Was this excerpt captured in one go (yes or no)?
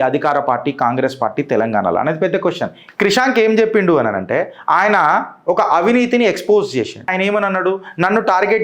no